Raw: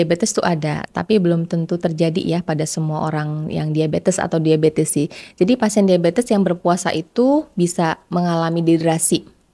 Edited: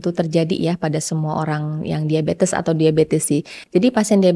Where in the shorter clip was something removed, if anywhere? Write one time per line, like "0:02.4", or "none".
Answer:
none